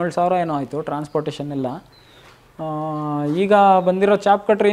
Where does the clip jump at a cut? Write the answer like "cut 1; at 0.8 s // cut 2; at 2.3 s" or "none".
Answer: none